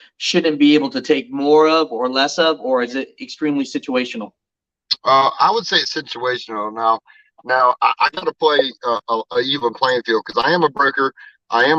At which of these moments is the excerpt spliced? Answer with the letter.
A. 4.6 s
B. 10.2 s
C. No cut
C